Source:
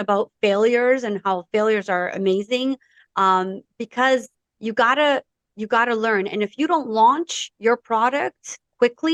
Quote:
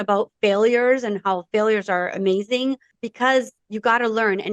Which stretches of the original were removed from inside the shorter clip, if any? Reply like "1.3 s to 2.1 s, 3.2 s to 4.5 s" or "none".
3.0 s to 3.7 s, 4.4 s to 5.5 s